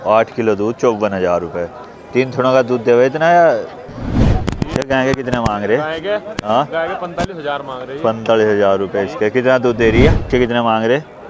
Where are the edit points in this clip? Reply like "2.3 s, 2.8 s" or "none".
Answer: 4.3 s, 10.3 s